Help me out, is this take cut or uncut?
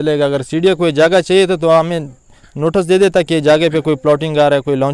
uncut